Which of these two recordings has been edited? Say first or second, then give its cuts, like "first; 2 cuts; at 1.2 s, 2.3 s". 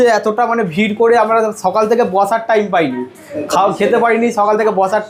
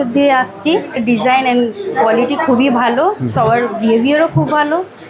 second; 1 cut; at 1.0 s